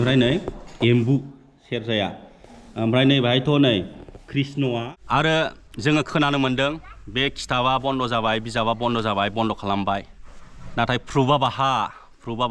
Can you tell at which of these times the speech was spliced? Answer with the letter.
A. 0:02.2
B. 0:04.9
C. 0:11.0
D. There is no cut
B